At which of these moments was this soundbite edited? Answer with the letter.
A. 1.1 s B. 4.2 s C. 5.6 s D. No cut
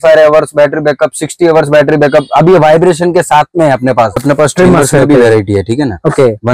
B